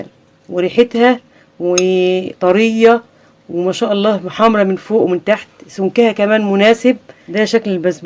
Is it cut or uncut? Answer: cut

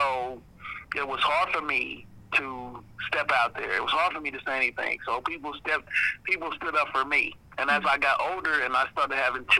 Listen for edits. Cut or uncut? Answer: uncut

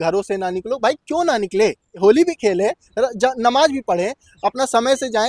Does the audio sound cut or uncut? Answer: cut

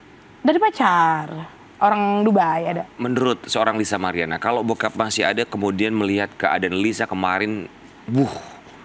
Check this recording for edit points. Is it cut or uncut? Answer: cut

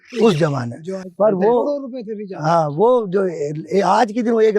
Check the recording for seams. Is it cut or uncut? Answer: uncut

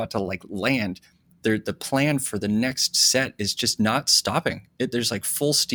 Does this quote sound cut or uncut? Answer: uncut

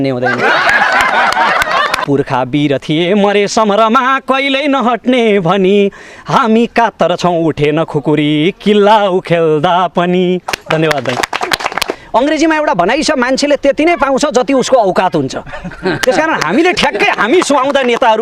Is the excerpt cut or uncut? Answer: cut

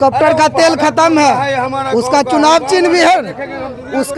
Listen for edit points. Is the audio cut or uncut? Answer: uncut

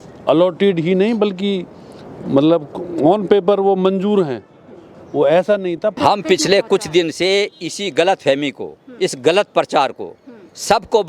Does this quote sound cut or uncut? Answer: cut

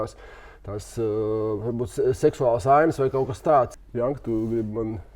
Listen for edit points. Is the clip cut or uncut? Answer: cut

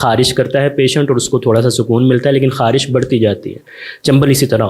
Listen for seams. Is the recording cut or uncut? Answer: uncut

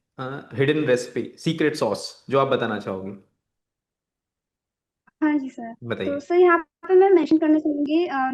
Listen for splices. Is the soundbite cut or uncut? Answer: uncut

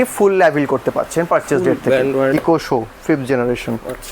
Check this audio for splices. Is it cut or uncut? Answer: cut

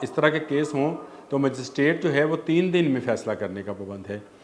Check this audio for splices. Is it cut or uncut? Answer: uncut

